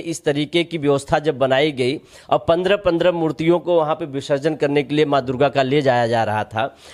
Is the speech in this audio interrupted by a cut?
no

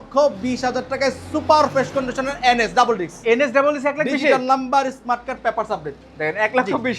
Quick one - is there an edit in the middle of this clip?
no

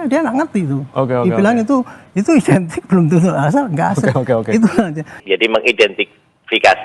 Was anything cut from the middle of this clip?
yes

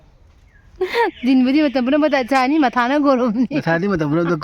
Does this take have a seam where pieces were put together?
no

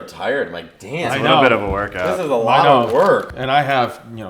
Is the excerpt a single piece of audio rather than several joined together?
no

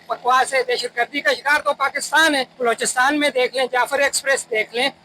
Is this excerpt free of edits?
no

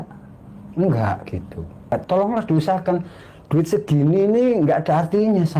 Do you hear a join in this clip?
yes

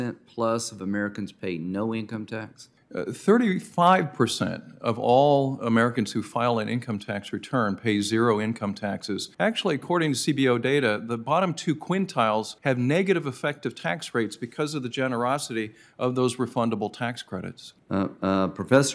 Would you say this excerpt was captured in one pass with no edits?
no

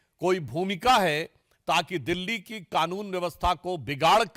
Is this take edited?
no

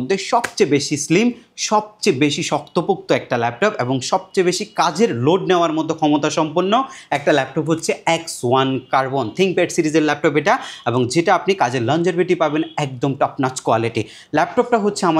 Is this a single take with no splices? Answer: yes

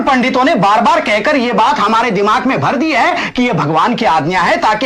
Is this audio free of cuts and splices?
yes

